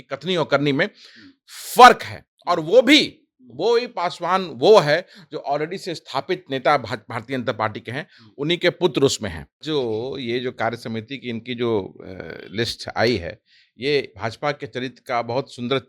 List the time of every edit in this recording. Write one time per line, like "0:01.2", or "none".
0:09.6